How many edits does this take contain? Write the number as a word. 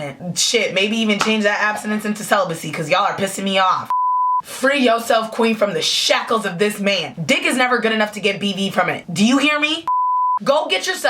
two